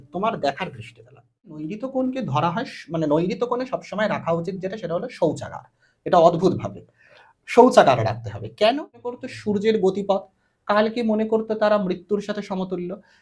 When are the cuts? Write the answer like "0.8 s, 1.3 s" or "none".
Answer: 1.6 s, 9.2 s